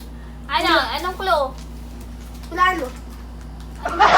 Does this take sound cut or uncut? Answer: cut